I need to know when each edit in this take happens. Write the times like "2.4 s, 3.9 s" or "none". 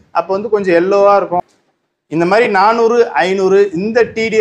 1.4 s